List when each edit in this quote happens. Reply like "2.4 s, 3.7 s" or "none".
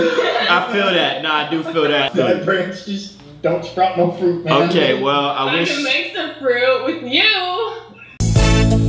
2.1 s